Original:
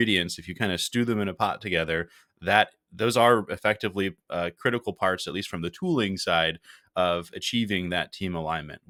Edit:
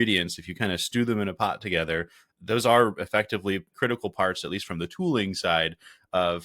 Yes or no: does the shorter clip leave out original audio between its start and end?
yes